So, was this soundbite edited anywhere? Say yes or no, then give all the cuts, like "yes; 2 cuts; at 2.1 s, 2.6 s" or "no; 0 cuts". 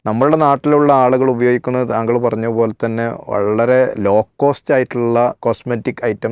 no; 0 cuts